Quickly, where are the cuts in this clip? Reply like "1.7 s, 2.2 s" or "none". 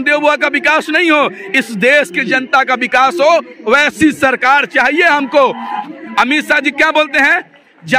5.8 s

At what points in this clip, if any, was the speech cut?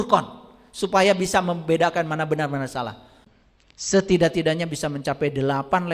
3.3 s

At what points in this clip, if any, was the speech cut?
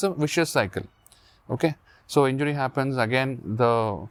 none

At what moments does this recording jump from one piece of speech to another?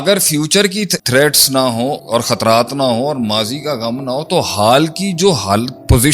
1.0 s, 2.0 s

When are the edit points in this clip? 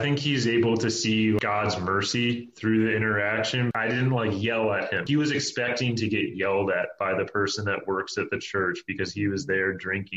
1.4 s, 3.7 s, 5.0 s

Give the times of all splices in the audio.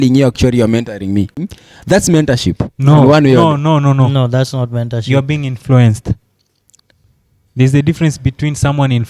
1.6 s

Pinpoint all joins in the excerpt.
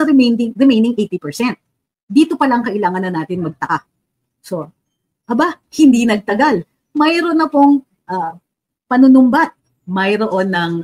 none

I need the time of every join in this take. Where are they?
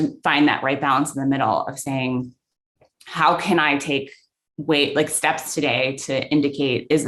none

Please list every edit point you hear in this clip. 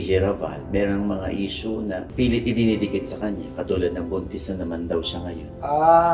none

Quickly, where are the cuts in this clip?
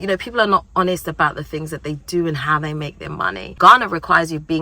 3.5 s

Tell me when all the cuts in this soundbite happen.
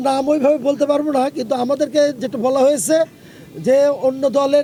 none

